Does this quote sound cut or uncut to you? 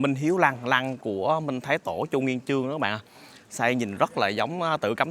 uncut